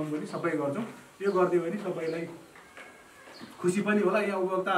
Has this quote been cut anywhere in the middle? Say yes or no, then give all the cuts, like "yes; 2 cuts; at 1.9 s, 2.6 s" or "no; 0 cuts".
no; 0 cuts